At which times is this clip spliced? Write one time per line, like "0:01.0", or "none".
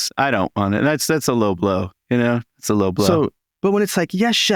0:03.4